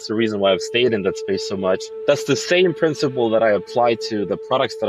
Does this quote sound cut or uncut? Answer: uncut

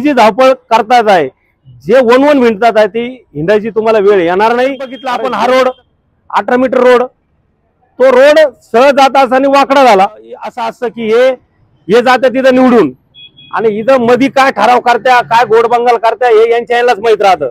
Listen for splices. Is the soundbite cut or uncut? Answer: cut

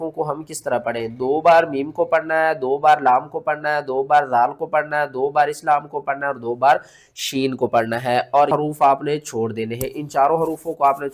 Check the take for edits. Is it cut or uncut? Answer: cut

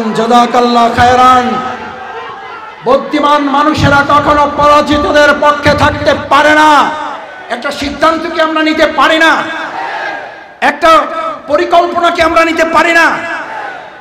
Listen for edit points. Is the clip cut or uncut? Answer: cut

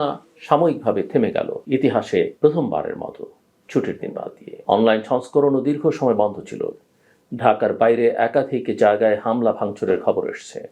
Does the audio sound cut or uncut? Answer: cut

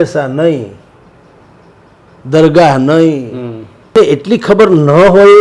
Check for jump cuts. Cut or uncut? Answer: cut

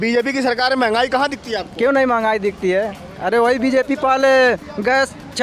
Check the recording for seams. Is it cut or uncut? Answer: uncut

